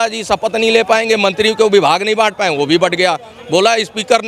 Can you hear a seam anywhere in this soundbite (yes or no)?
no